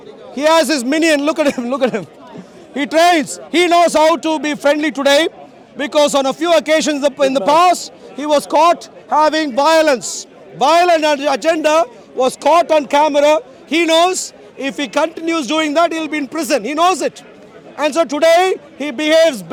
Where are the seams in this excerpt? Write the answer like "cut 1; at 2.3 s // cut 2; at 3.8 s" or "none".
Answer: none